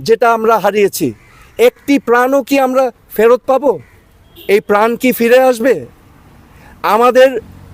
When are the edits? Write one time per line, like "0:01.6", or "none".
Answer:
none